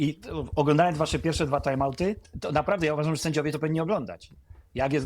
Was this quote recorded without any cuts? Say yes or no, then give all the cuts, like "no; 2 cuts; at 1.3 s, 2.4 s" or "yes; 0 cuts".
no; 1 cut; at 2.3 s